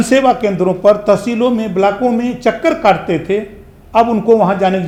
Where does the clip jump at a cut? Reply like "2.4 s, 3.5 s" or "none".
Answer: none